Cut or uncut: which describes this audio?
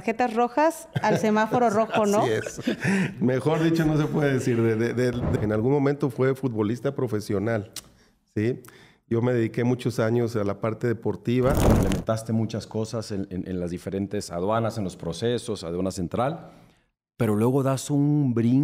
cut